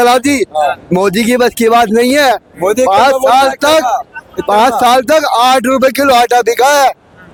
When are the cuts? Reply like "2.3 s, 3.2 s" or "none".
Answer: none